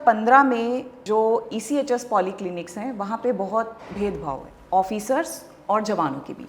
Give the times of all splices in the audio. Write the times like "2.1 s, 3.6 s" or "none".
0.9 s

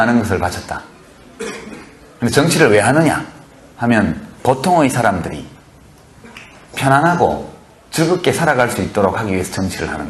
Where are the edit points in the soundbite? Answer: none

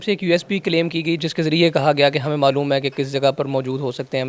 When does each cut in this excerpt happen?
1.2 s

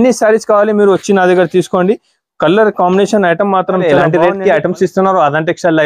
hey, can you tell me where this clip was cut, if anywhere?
4.0 s

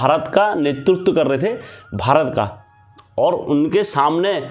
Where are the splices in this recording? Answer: none

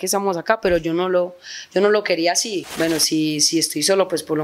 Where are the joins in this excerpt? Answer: 2.6 s

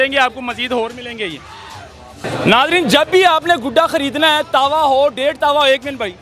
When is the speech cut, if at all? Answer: 2.2 s

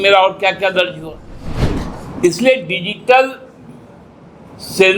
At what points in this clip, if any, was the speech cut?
1.6 s

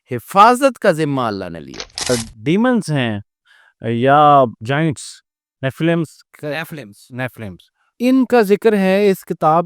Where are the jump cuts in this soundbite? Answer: 2.1 s

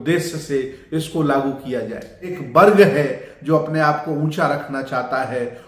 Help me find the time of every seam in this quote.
2.4 s

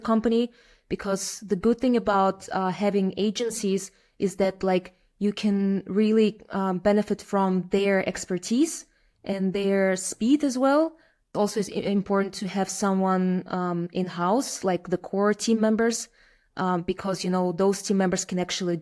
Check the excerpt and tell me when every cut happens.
11.3 s

